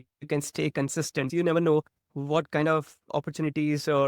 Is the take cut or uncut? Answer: uncut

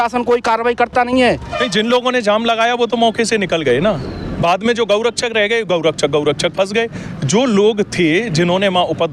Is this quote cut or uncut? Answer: cut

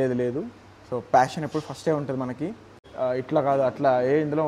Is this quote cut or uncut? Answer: cut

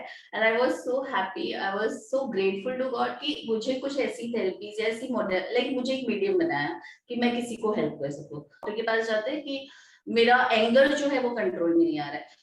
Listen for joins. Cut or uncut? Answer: cut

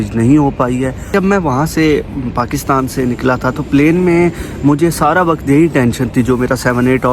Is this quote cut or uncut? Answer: cut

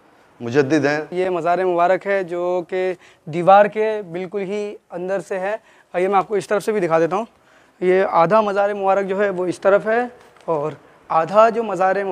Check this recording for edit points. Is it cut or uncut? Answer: cut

